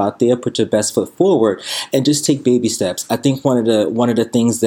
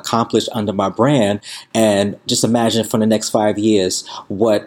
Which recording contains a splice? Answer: second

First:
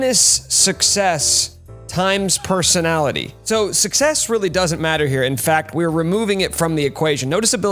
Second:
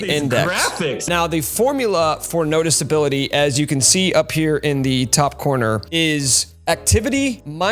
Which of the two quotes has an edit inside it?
second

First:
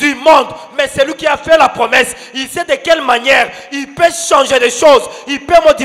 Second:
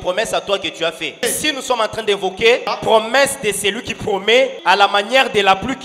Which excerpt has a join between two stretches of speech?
second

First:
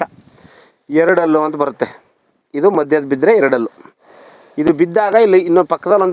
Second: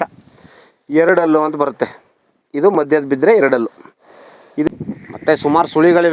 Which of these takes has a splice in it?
second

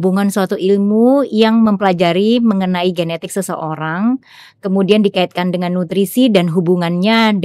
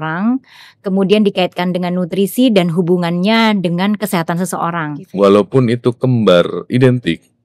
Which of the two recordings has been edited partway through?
second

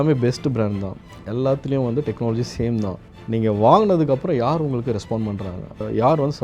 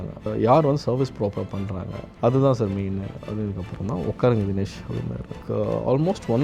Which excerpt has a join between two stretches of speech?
second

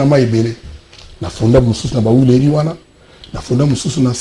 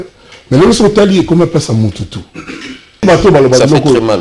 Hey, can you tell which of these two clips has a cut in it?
second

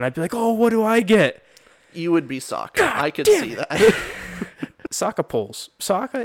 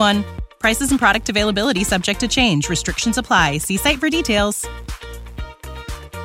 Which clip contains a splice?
first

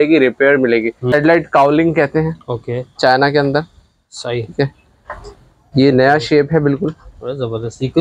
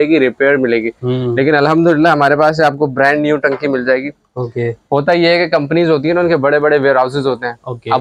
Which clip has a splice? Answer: first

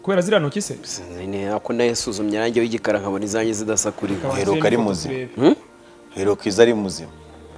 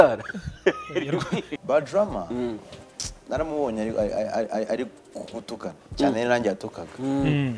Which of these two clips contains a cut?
second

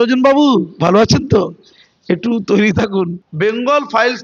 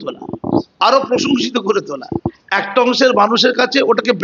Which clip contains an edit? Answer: first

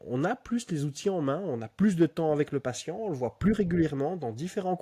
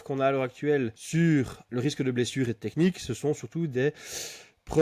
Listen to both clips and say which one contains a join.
second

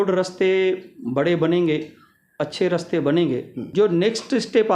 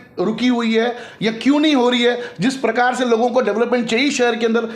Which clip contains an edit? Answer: first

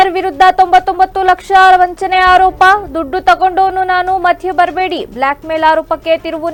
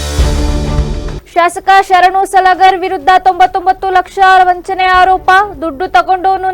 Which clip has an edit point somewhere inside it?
second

